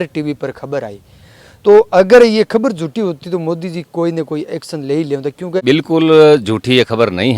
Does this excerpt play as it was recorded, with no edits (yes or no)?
no